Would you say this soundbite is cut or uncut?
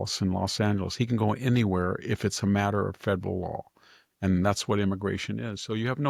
uncut